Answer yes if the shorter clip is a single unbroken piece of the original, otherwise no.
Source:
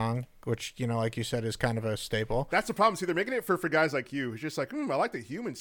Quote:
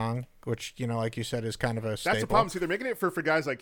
no